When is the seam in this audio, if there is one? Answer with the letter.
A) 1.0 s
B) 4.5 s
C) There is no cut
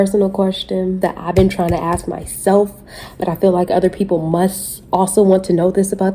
A